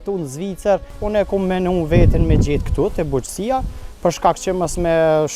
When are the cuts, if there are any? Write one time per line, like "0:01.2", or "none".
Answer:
0:01.0